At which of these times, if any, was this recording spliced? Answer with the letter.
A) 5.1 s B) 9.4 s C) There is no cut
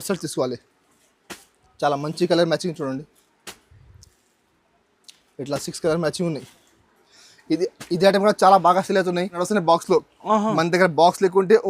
B